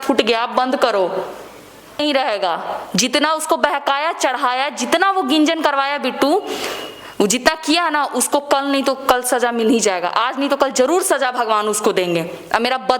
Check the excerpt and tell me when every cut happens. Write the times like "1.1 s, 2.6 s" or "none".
2.0 s